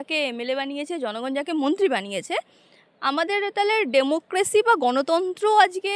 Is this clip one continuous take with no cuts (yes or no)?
yes